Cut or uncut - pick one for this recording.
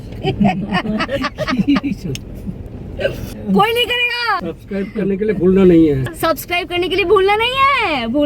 cut